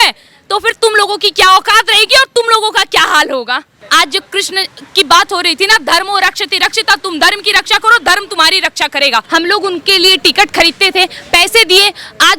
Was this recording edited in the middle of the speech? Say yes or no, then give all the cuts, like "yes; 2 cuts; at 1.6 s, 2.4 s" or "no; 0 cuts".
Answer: yes; 2 cuts; at 3.8 s, 9.3 s